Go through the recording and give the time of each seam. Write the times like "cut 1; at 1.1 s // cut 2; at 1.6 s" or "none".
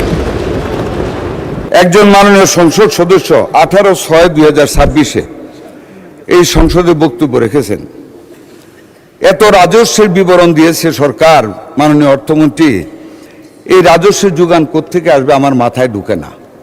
cut 1; at 1.6 s